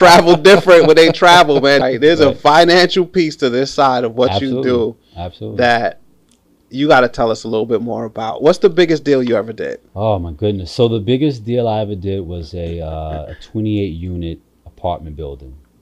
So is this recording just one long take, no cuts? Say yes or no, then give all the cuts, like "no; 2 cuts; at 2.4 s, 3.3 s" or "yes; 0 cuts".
no; 1 cut; at 1.8 s